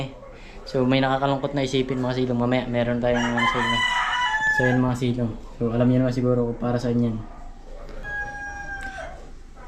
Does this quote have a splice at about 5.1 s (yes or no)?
no